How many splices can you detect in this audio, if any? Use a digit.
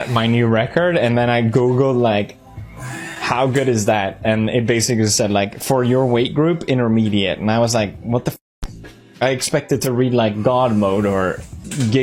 0